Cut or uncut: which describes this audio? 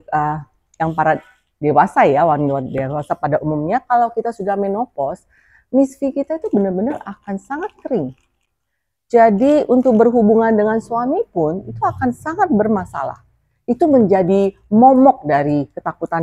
uncut